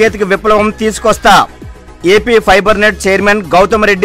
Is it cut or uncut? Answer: uncut